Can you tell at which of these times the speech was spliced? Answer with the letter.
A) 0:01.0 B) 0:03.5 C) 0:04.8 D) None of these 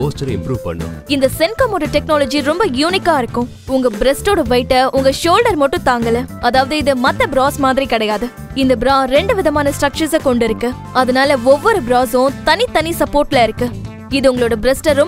A